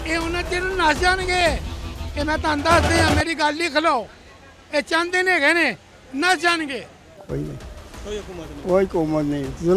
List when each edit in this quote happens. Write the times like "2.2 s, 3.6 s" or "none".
7.1 s